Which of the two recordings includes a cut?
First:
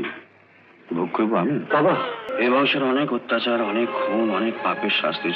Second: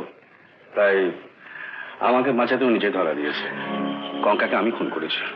first; 1 cut; at 2.3 s

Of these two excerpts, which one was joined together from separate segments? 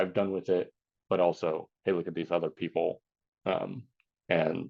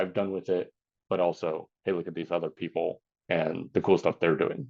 second; 1 cut; at 3.1 s

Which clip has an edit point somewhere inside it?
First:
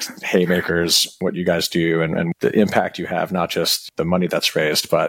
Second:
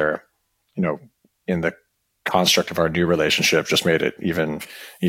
first; 3 cuts; at 1.1 s, 2.3 s, 3.8 s

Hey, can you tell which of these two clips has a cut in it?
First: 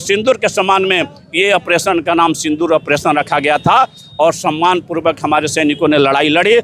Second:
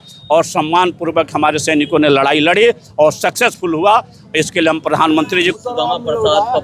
second; 1 cut; at 5.5 s

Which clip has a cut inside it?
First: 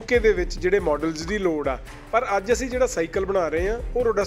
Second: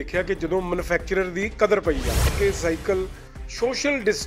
second; 1 cut; at 2.3 s

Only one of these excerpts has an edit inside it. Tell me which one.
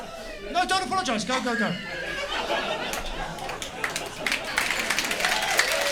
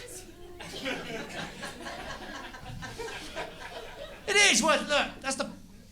second; 1 cut; at 4.0 s

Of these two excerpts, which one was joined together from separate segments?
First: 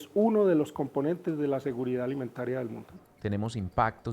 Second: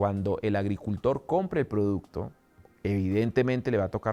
first; 1 cut; at 3.1 s

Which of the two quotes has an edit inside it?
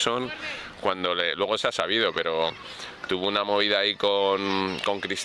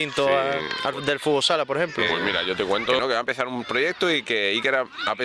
second; 1 cut; at 3.0 s

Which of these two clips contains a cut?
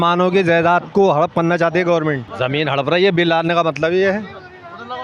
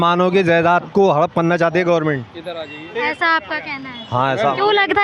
first; 1 cut; at 2.3 s

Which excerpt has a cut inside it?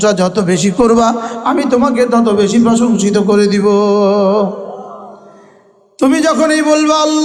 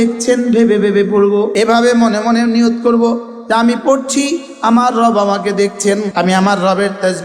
second; 2 cuts; at 1.5 s, 6.1 s

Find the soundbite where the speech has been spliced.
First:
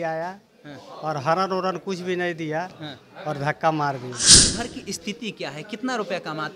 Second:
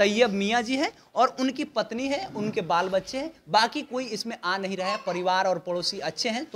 first; 1 cut; at 4.5 s

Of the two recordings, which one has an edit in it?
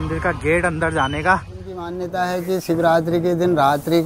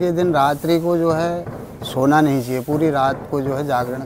first; 1 cut; at 2.0 s

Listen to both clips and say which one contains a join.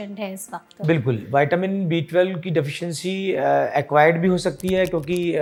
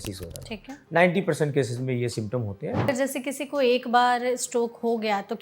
second; 1 cut; at 2.9 s

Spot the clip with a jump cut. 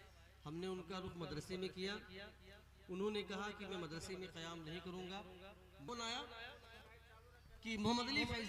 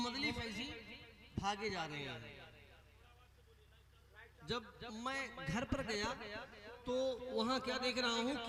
first; 1 cut; at 5.9 s

